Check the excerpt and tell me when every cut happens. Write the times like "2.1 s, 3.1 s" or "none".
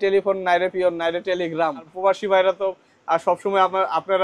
1.9 s